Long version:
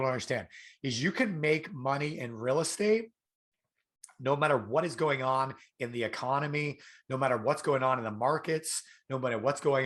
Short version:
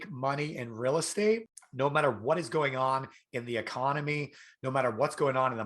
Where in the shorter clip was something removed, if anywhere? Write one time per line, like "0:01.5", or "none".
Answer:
0:01.6